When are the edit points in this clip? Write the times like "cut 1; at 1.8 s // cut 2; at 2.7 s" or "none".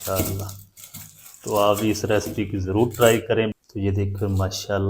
cut 1; at 3.5 s